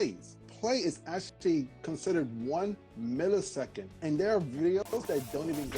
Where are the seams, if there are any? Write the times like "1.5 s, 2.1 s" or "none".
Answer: 4.0 s, 4.9 s